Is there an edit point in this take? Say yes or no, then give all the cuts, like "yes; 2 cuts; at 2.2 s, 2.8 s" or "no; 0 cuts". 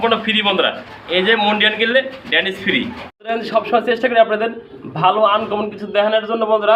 no; 0 cuts